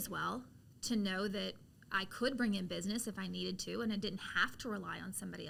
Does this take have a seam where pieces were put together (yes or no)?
no